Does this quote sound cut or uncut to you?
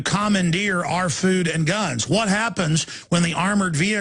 cut